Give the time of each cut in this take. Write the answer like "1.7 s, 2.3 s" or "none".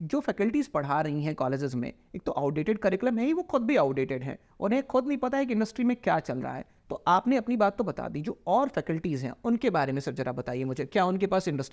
none